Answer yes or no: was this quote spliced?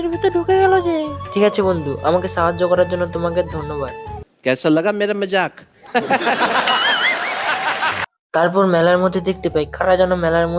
no